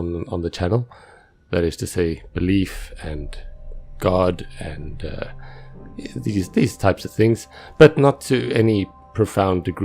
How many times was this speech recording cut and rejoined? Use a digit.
1